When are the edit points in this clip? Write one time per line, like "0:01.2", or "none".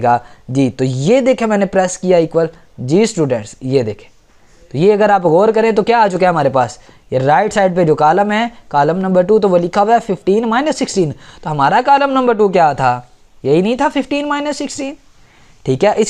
none